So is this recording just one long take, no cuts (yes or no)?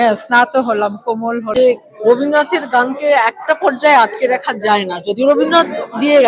no